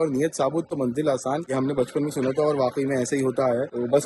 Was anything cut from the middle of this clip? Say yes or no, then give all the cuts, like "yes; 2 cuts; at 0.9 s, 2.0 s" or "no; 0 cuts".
no; 0 cuts